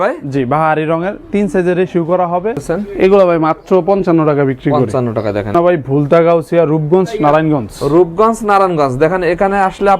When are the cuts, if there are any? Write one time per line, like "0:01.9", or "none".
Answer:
0:02.6
0:05.5